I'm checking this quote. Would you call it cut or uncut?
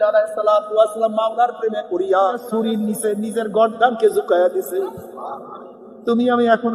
cut